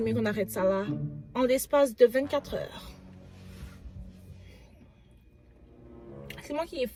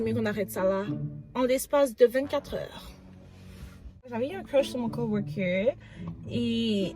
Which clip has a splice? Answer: second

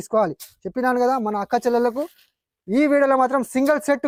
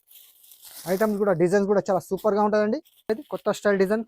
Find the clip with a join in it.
second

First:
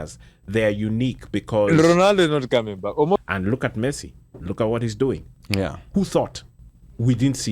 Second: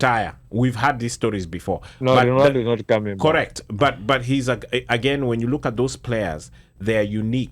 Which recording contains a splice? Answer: first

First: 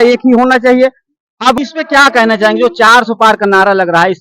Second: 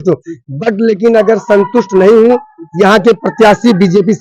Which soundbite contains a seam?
first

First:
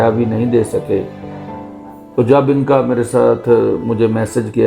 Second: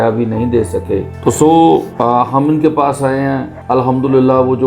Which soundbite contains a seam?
second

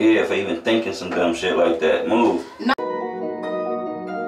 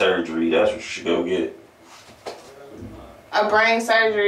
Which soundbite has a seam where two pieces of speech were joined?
first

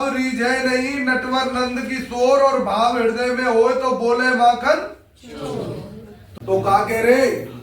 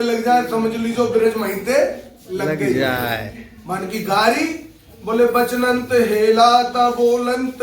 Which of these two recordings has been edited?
first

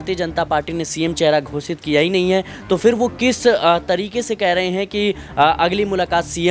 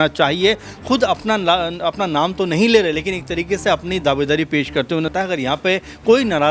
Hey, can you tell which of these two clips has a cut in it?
second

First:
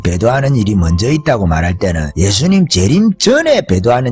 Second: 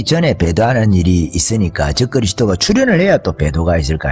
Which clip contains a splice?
first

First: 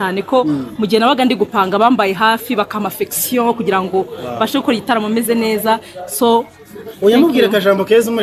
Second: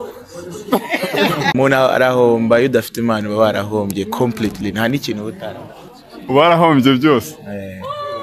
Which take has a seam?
second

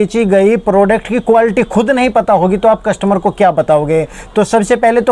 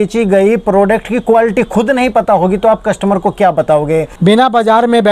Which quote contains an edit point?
second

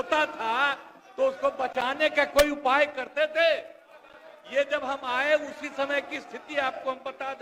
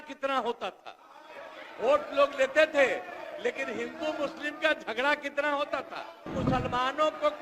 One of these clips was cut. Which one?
second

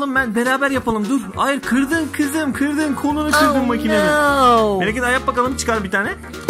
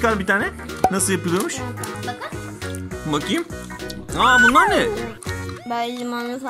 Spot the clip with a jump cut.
second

